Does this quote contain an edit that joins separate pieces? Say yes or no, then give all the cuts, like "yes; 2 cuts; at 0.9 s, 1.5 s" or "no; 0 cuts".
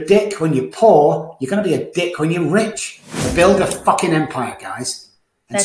yes; 1 cut; at 3.3 s